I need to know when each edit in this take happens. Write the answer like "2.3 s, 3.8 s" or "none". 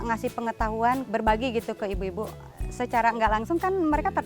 1.0 s